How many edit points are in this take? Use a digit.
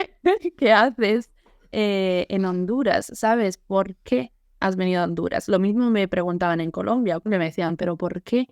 1